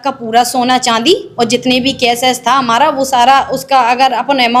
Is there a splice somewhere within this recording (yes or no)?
no